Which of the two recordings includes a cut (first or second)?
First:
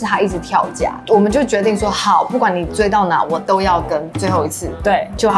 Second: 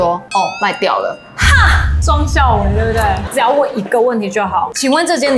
second